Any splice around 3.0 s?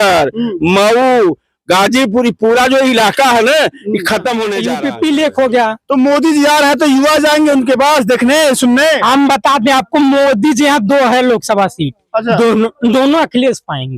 no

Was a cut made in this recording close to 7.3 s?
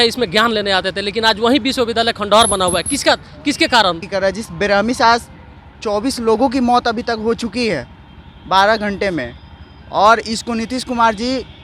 no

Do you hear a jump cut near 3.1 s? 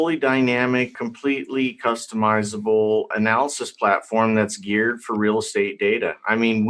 yes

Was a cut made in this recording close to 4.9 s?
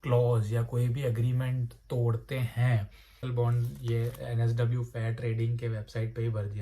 no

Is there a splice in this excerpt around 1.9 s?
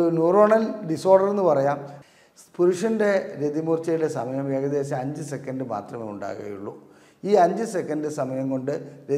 yes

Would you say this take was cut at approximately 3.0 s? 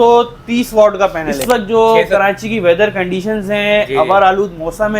no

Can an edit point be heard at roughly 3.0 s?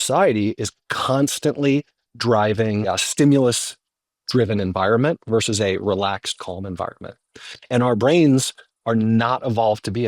yes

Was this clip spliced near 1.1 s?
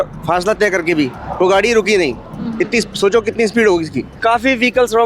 no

